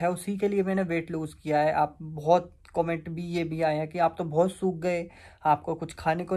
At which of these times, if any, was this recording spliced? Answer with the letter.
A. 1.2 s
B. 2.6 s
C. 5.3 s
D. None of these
D